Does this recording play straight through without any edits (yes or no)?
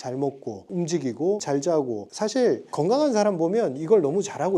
yes